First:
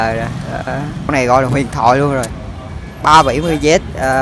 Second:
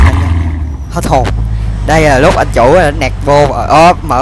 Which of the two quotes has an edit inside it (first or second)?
first